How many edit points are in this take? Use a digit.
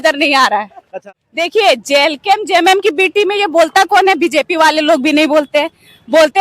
1